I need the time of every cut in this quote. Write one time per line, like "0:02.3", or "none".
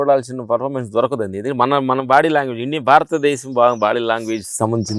none